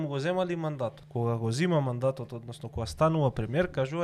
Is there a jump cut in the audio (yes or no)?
yes